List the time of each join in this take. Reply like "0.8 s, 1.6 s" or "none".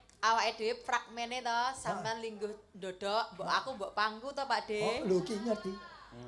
none